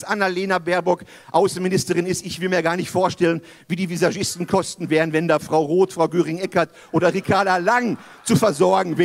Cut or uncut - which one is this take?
uncut